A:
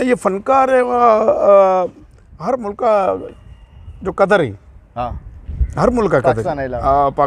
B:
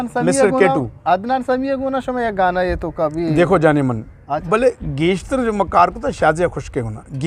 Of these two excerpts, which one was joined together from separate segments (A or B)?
B